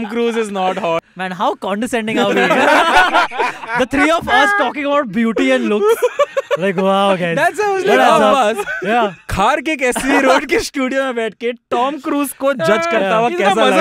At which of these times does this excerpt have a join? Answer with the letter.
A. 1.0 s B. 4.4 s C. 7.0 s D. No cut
A